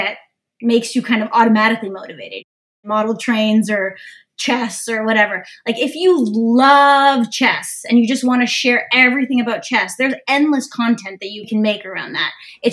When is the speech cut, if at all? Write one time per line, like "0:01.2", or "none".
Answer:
0:02.6
0:11.5